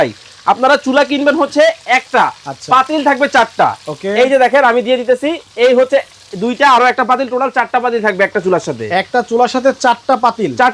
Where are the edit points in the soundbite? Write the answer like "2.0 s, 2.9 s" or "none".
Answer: none